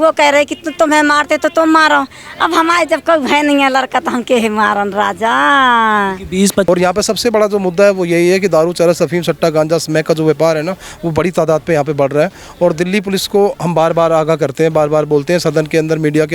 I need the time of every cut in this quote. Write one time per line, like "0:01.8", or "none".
0:06.7